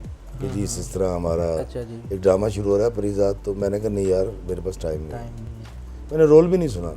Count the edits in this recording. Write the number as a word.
zero